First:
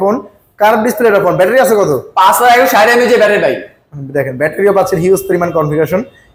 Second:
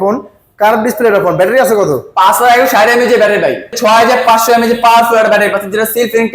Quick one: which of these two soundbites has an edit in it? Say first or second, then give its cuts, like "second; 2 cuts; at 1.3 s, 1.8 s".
second; 1 cut; at 3.8 s